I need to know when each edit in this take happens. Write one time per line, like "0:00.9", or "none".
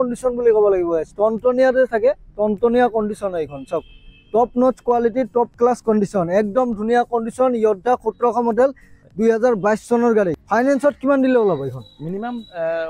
0:10.4